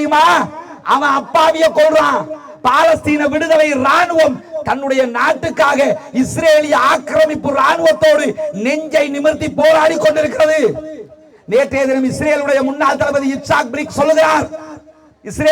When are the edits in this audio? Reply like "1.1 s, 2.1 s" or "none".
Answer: none